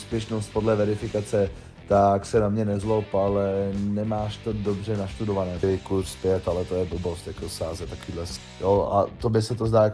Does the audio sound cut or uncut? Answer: cut